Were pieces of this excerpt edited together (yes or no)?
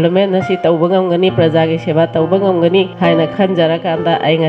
yes